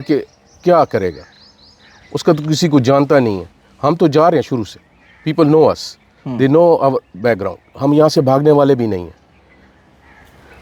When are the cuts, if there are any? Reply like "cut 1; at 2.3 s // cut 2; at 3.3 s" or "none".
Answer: none

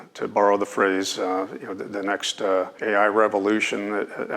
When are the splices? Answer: cut 1; at 2.7 s

